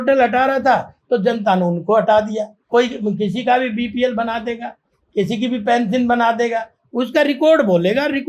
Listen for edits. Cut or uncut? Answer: cut